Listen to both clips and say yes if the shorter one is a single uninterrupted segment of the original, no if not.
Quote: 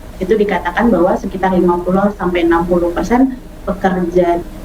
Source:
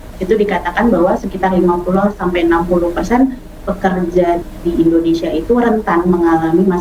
yes